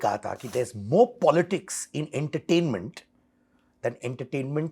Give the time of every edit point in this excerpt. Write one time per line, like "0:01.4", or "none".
none